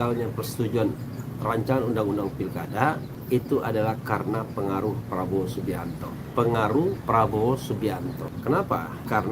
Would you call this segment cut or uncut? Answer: uncut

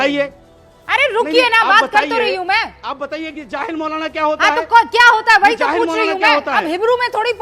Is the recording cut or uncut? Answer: uncut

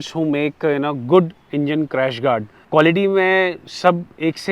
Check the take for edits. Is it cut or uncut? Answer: cut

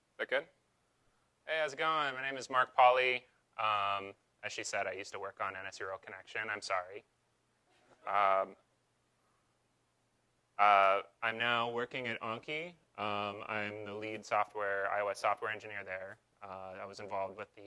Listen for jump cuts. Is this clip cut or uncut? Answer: uncut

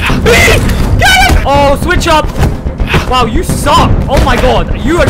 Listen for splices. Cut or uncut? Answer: cut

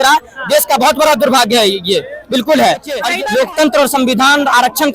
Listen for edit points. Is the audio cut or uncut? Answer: cut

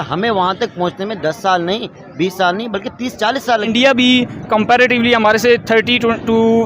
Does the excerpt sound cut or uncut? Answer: cut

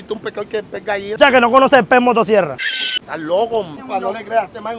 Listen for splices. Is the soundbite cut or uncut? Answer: cut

